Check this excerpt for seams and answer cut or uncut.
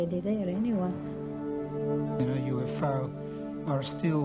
uncut